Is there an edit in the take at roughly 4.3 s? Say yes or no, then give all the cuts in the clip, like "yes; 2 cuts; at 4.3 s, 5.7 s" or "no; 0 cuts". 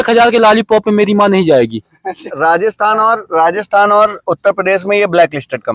no; 1 cut; at 2.3 s